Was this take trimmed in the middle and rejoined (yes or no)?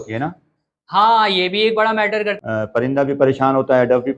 yes